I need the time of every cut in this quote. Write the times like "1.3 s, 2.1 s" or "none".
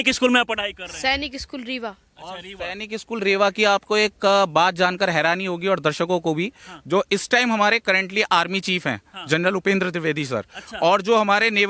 none